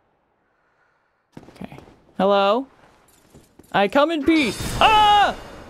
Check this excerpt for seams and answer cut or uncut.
uncut